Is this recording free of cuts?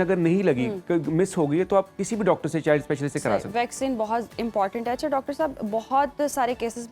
yes; 0 cuts

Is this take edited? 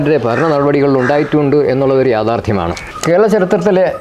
yes; 1 cut; at 2.9 s

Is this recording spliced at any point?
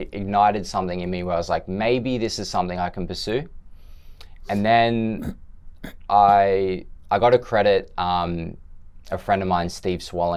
no; 0 cuts

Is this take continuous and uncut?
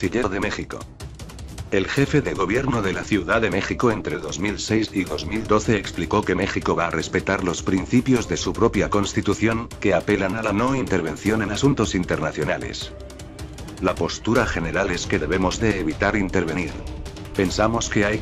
yes; 0 cuts

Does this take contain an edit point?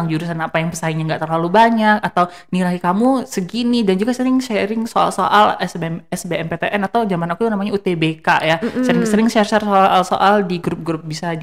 no; 0 cuts

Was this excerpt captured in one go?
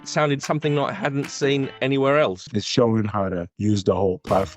no; 1 cut; at 2.4 s

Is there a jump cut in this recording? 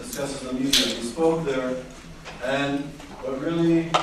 no; 0 cuts

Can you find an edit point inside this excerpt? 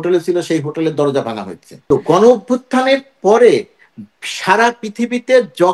yes; 1 cut; at 1.8 s

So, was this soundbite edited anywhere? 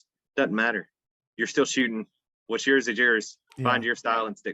yes; 1 cut; at 3.4 s

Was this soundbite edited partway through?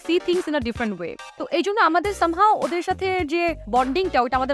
yes; 1 cut; at 1.3 s

